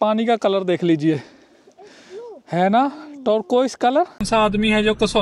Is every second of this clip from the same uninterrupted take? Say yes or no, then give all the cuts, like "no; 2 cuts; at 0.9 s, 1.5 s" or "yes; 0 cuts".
no; 1 cut; at 4.2 s